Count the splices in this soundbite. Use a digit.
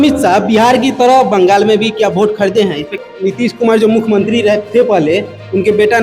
1